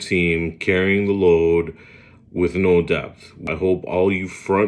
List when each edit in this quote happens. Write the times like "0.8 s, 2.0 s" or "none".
3.5 s